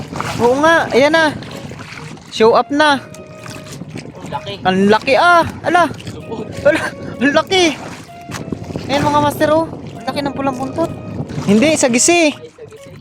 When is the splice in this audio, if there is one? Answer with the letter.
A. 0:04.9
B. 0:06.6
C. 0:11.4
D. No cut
C